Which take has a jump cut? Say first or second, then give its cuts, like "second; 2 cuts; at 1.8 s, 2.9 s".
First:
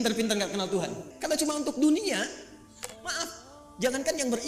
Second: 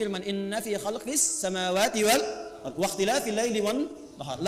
first; 1 cut; at 1.1 s